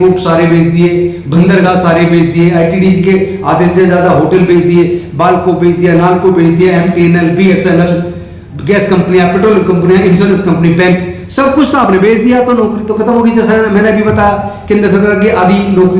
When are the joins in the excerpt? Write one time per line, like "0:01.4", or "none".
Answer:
none